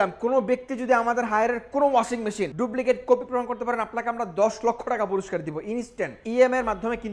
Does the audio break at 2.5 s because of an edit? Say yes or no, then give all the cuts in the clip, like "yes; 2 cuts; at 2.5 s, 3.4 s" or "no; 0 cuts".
yes; 2 cuts; at 2.5 s, 6.2 s